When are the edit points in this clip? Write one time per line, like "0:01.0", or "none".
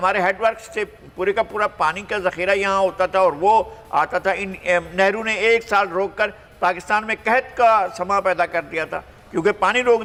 none